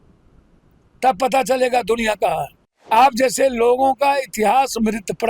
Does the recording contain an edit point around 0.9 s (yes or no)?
no